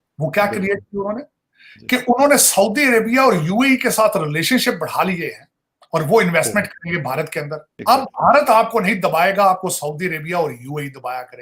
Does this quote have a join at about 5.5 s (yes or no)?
no